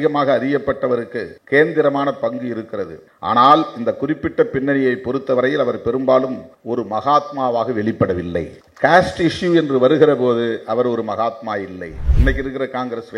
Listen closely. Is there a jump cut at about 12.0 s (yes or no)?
yes